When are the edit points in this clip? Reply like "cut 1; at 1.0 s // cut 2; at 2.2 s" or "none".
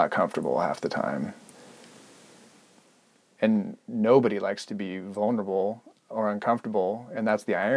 none